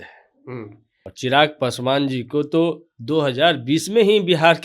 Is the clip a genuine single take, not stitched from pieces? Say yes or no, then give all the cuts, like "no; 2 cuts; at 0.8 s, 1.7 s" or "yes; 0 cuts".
no; 1 cut; at 1.1 s